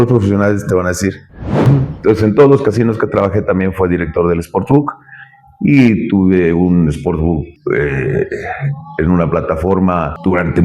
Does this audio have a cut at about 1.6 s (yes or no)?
yes